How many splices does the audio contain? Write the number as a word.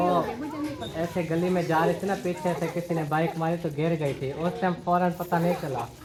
zero